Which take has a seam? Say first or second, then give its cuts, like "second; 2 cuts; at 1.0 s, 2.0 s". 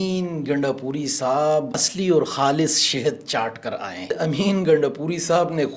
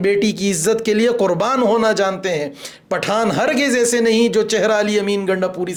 first; 2 cuts; at 1.8 s, 4.1 s